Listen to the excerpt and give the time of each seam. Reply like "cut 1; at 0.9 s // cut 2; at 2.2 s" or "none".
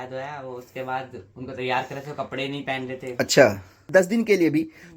cut 1; at 3.9 s